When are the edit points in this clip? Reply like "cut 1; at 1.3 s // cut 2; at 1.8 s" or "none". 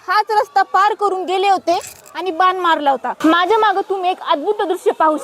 cut 1; at 3.1 s